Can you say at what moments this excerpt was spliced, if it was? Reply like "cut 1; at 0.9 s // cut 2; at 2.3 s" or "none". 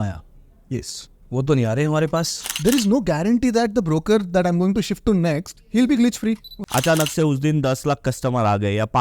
cut 1; at 2.4 s // cut 2; at 6.5 s